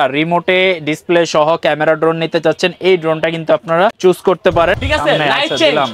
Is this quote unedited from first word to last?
no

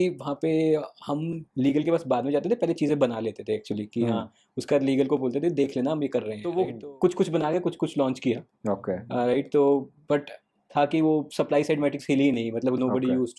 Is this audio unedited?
no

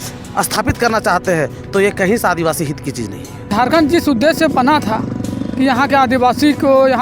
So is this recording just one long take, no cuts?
no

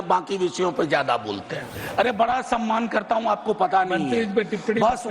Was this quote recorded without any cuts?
no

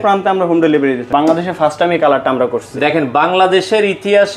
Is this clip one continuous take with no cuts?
no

